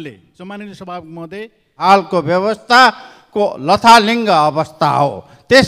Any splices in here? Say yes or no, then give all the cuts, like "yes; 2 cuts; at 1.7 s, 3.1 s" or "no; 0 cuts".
yes; 1 cut; at 1.8 s